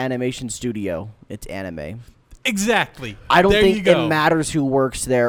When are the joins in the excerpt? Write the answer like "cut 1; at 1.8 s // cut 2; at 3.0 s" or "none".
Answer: none